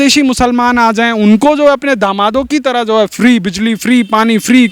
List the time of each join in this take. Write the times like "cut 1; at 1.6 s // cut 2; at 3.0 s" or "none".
none